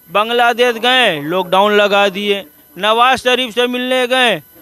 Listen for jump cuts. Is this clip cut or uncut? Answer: uncut